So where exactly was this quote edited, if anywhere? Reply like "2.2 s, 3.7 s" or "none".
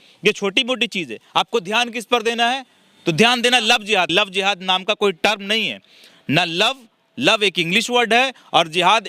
4.1 s